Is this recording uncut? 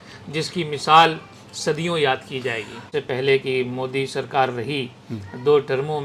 no; 1 cut; at 2.8 s

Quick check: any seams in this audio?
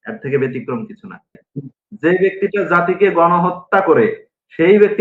yes; 1 cut; at 1.5 s

